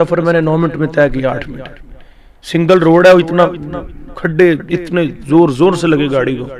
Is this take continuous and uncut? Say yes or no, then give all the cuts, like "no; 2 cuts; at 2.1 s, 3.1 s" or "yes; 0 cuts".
yes; 0 cuts